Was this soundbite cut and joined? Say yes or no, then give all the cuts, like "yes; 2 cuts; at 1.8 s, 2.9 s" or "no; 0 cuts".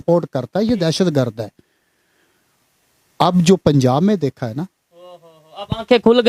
no; 0 cuts